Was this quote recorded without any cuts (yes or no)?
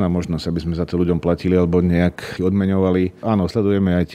no